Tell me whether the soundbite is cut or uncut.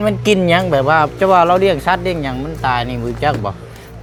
uncut